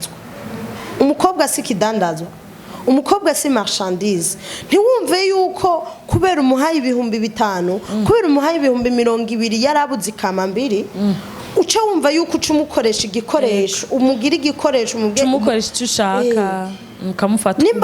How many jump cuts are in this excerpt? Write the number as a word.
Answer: zero